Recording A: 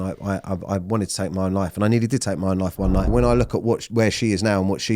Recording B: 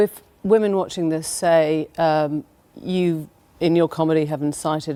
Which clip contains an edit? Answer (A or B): A